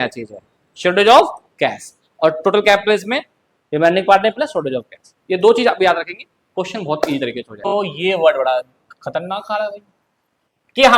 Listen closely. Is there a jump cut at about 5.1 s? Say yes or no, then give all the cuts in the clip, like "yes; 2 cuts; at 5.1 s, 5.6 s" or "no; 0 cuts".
no; 1 cut; at 7.6 s